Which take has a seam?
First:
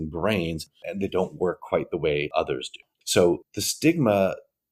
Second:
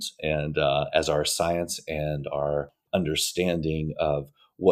first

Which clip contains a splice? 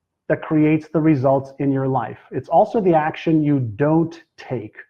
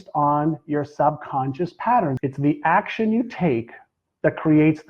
second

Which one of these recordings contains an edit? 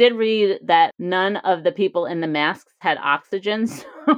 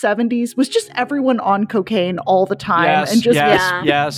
first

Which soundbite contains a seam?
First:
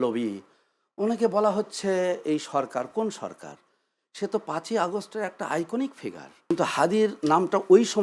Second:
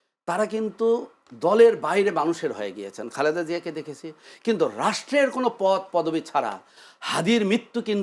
first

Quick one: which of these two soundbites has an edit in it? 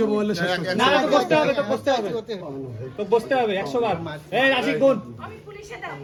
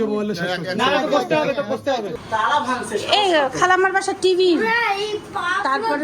second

